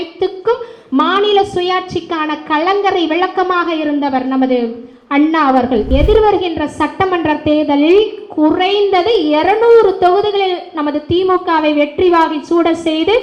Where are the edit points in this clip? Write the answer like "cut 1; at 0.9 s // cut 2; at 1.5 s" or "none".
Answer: cut 1; at 5.9 s